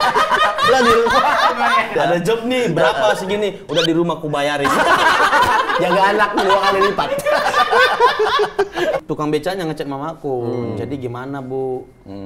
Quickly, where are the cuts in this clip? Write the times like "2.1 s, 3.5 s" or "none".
1.9 s, 9.0 s